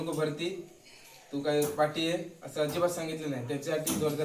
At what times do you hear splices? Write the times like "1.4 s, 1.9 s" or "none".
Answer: none